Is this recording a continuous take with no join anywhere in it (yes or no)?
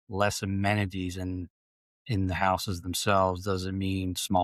yes